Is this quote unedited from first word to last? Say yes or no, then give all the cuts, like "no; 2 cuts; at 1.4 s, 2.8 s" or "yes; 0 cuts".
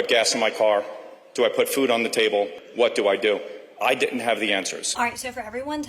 no; 2 cuts; at 2.6 s, 4.8 s